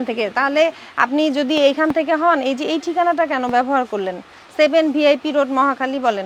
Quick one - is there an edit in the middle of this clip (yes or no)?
no